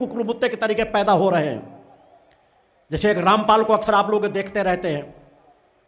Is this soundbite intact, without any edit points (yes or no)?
yes